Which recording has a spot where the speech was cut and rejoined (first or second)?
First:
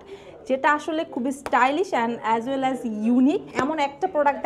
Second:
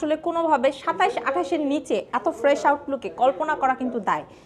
first